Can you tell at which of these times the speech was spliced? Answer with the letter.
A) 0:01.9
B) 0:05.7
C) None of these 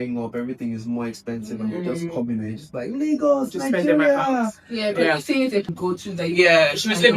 B